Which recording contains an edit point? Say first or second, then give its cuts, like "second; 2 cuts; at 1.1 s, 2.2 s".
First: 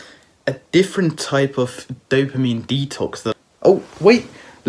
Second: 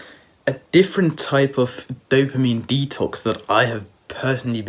first; 1 cut; at 3.4 s